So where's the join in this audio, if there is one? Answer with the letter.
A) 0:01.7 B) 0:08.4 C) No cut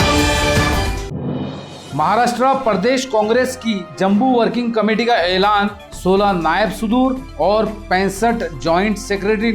A